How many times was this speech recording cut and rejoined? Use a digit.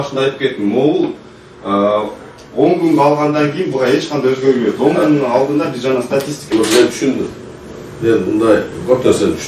1